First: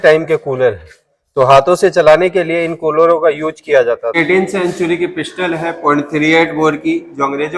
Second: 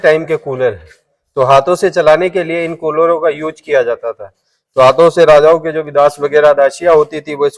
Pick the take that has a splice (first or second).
first